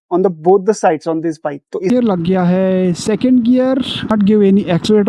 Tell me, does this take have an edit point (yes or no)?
yes